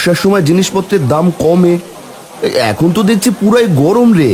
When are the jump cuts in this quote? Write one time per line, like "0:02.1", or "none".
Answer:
none